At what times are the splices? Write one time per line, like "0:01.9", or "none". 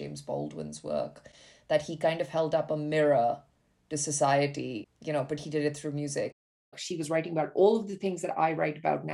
0:04.9
0:06.7